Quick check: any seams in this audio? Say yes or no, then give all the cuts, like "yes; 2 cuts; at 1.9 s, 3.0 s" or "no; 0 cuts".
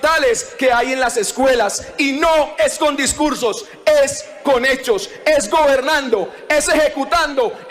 no; 0 cuts